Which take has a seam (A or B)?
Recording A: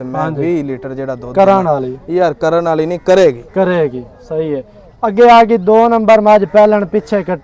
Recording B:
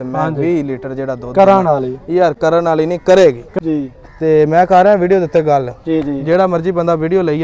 B